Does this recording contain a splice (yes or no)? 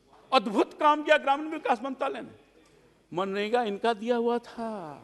no